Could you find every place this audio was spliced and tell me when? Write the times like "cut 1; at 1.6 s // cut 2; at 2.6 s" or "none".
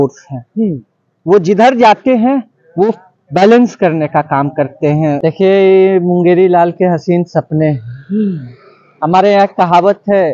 cut 1; at 5.2 s